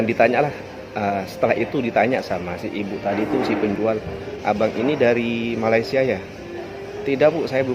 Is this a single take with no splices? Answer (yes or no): no